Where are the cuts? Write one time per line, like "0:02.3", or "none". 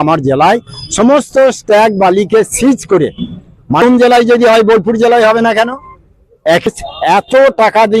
0:03.8
0:06.7